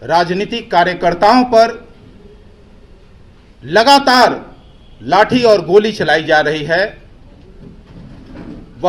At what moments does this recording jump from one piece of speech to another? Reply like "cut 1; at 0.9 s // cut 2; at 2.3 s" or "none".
none